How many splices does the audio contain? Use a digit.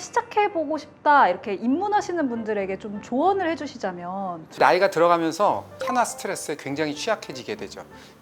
2